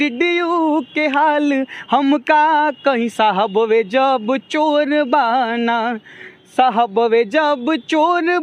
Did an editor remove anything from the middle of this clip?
no; 0 cuts

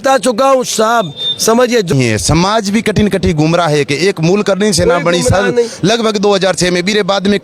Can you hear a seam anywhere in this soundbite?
yes; 1 cut; at 1.9 s

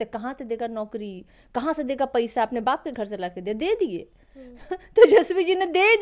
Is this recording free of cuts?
yes; 0 cuts

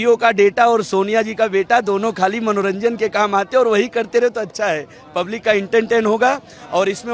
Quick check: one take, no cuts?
yes; 0 cuts

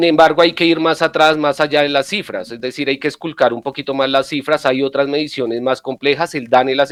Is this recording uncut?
yes; 0 cuts

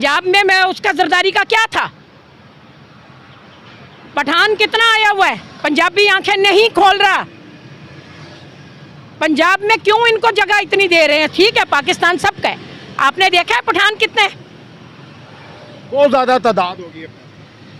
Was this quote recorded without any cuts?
yes; 0 cuts

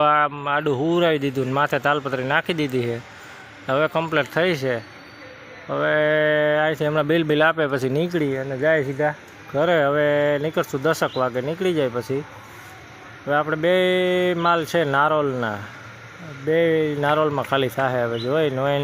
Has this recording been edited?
no; 0 cuts

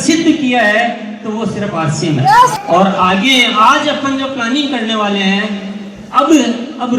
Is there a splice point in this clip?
yes; 1 cut; at 2.6 s

